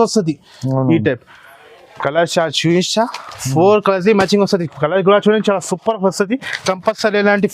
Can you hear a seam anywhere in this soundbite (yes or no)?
no